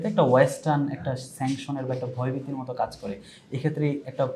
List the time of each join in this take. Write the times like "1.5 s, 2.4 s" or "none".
none